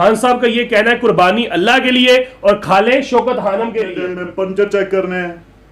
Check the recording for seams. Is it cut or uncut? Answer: cut